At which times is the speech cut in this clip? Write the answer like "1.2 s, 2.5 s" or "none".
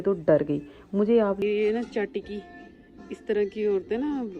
1.4 s